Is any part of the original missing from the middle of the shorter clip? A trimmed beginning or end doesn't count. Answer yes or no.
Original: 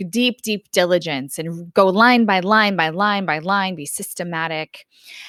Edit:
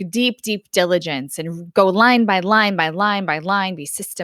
no